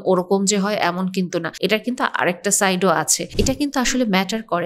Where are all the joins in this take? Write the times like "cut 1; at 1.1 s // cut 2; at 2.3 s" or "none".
cut 1; at 1.5 s // cut 2; at 3.2 s